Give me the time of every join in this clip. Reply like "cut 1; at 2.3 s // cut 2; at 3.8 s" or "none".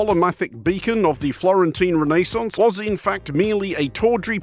cut 1; at 2.5 s